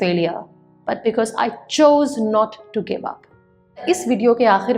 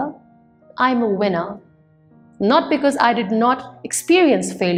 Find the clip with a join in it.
first; 1 cut; at 3.8 s

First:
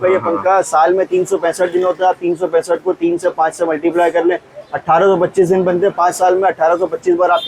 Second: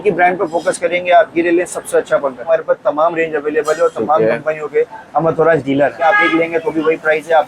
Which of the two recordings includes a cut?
second; 2 cuts; at 2.4 s, 6.0 s

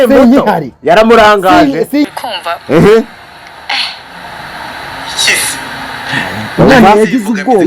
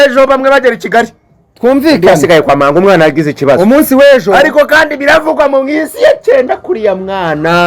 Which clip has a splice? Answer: first; 1 cut; at 2.1 s

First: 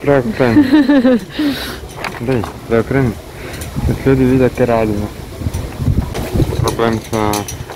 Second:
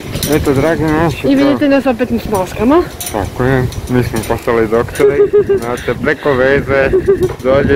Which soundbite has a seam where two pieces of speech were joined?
first; 1 cut; at 6.1 s

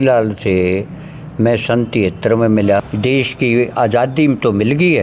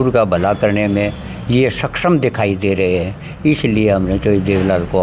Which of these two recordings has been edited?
first; 1 cut; at 2.9 s

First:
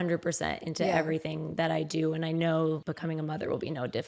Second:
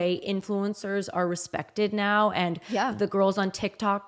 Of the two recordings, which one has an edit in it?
first; 1 cut; at 2.8 s

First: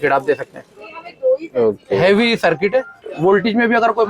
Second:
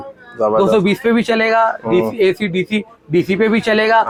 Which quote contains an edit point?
first; 1 cut; at 3.0 s

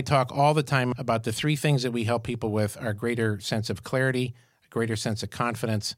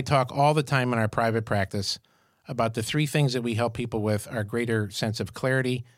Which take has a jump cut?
first; 1 cut; at 0.9 s

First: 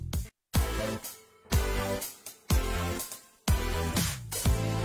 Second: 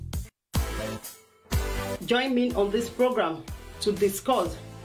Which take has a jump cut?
first; 1 cut; at 1.5 s

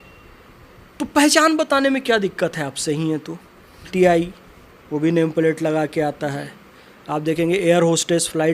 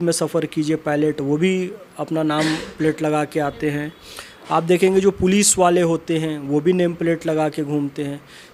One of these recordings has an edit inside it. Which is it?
first; 1 cut; at 3.9 s

